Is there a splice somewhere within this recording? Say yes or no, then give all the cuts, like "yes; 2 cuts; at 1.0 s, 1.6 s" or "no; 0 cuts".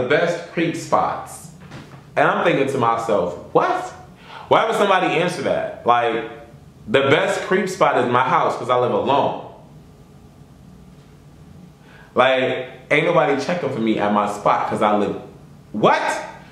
no; 0 cuts